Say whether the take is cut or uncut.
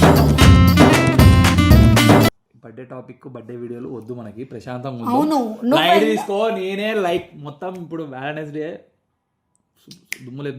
cut